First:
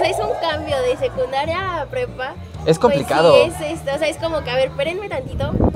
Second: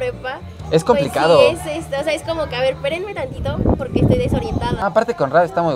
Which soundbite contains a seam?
second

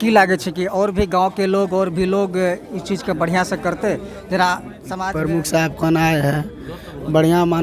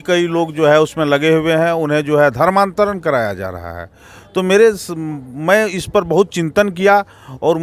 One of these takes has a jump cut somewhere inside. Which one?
first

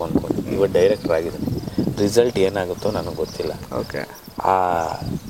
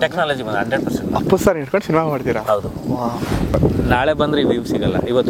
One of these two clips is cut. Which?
second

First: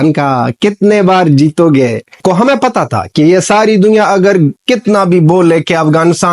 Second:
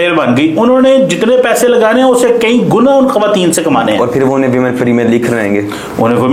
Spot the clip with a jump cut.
first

